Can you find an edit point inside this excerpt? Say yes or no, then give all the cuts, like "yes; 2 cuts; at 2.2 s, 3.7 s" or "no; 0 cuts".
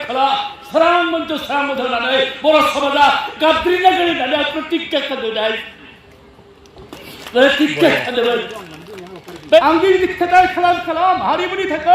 yes; 1 cut; at 9.6 s